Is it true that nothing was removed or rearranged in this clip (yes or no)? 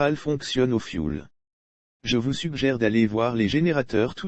yes